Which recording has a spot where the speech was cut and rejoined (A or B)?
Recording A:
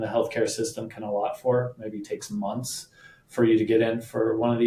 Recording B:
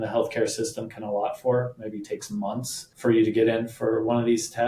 B